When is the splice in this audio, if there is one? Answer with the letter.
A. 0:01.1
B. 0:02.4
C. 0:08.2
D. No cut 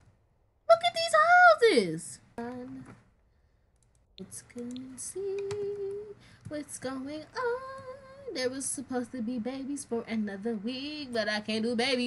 B